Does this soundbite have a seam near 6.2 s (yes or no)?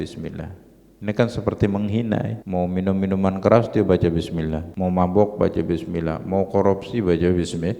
no